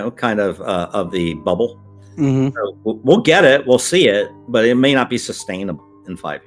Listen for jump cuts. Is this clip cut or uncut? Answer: uncut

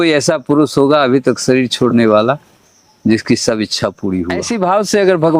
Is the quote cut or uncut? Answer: cut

